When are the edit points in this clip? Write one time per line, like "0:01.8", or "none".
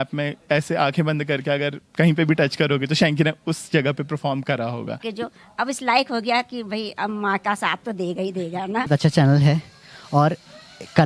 0:05.1
0:08.9